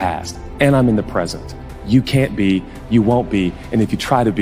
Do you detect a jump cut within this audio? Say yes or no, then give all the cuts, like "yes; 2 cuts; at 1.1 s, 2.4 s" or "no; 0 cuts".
no; 0 cuts